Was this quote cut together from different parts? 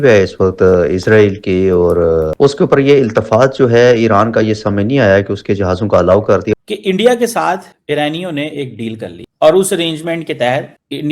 yes; 2 cuts; at 2.3 s, 6.5 s

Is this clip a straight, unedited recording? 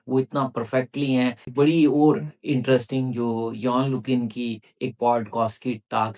no; 1 cut; at 1.5 s

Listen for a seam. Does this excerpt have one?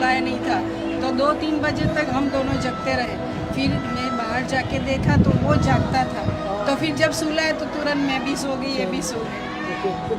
no; 0 cuts

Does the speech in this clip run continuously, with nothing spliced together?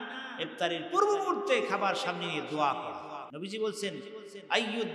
no; 1 cut; at 3.3 s

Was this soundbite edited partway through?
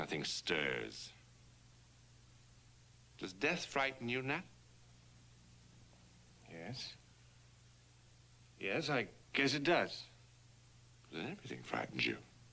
no; 0 cuts

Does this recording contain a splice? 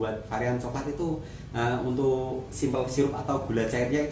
no; 0 cuts

